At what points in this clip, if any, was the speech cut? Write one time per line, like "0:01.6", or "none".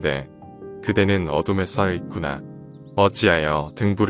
none